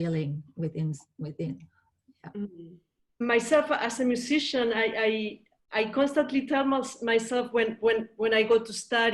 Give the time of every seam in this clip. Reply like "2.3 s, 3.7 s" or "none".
3.2 s

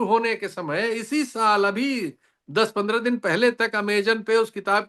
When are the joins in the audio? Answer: none

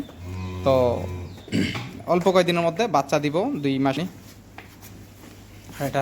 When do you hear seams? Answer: 4.0 s

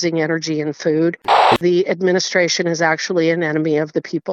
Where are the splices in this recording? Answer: 1.6 s

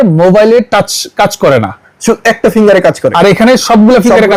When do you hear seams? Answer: none

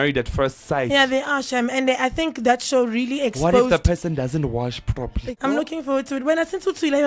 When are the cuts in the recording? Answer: 5.2 s

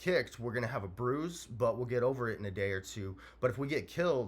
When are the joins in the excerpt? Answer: none

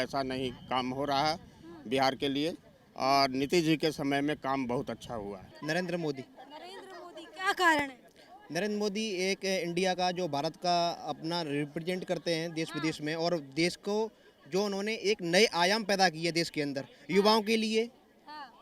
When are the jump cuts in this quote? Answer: 5.5 s

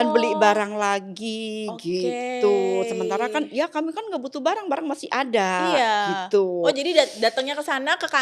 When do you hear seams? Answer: none

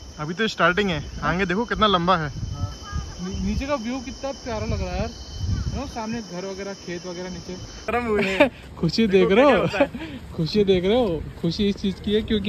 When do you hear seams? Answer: 7.9 s

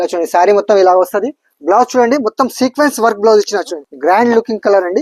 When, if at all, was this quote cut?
3.8 s

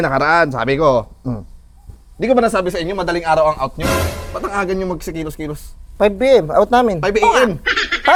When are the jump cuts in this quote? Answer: none

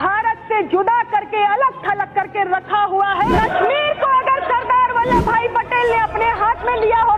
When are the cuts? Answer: 3.3 s

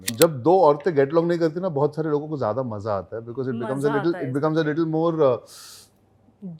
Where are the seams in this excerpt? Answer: none

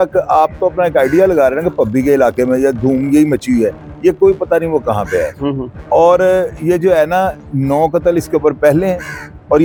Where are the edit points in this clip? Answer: none

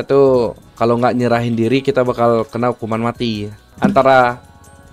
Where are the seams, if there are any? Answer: 3.6 s

